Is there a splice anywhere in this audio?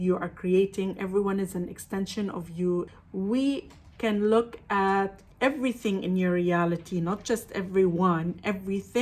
yes; 1 cut; at 2.9 s

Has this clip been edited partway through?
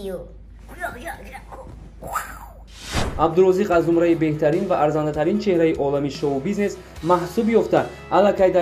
yes; 1 cut; at 2.9 s

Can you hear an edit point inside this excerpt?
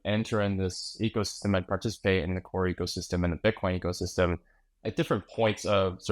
yes; 1 cut; at 4.8 s

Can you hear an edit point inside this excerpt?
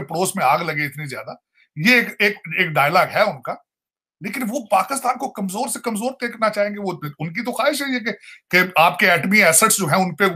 no; 0 cuts

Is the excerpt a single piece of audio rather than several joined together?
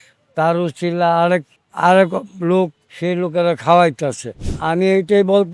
no; 1 cut; at 4.5 s

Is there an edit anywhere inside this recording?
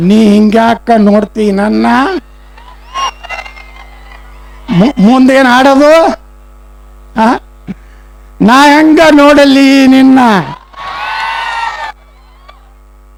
no; 0 cuts

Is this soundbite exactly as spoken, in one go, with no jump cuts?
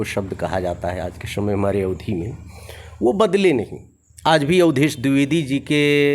yes; 0 cuts

